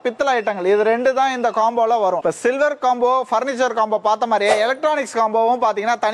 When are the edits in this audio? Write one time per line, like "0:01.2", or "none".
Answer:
0:02.2